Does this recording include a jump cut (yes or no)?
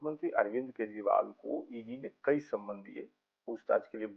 no